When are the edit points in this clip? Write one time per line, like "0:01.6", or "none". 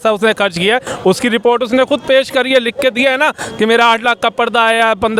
none